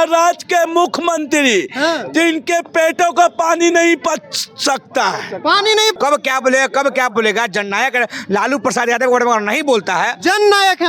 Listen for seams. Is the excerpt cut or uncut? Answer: cut